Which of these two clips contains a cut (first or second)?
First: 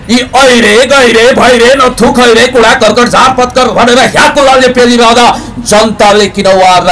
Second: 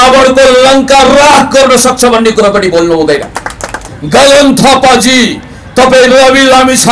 second